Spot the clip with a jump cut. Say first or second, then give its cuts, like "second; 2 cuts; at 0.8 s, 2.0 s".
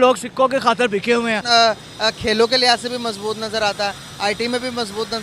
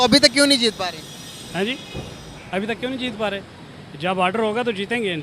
first; 1 cut; at 1.4 s